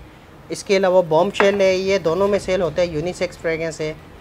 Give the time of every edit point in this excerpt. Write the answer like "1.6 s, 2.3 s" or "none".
none